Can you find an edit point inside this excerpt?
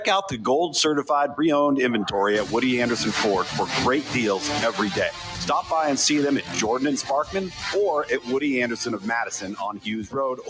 yes; 1 cut; at 9.1 s

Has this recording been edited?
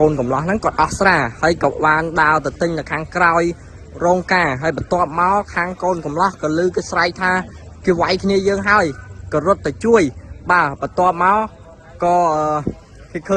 no; 0 cuts

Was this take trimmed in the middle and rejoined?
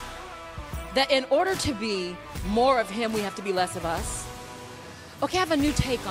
yes; 1 cut; at 0.9 s

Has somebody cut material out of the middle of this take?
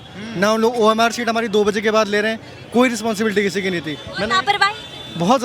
no; 0 cuts

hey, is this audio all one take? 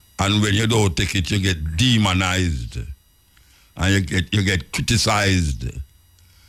yes; 0 cuts

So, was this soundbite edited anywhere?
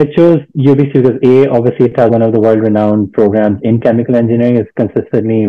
yes; 1 cut; at 2.1 s

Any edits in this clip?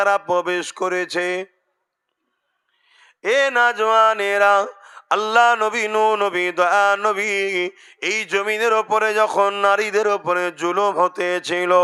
no; 0 cuts

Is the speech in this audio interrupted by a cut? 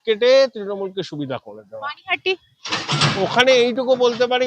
no; 0 cuts

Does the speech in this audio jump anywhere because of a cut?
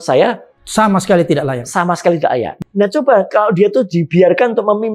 yes; 1 cut; at 2.5 s

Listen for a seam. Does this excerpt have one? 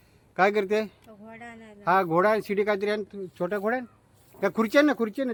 no; 0 cuts

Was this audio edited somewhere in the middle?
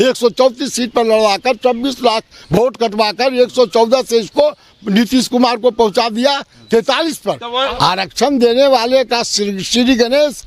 yes; 1 cut; at 7.7 s

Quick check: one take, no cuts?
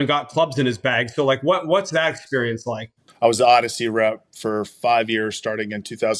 no; 1 cut; at 3.0 s

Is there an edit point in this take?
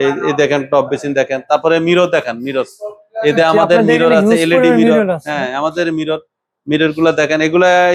no; 0 cuts

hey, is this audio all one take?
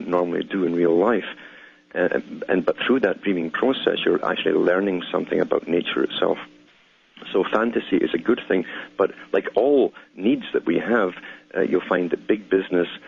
no; 1 cut; at 6.5 s

